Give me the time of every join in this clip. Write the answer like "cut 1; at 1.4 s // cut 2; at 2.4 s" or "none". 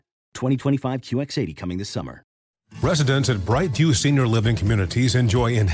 cut 1; at 2.4 s